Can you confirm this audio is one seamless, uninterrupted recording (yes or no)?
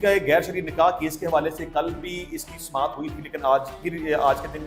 yes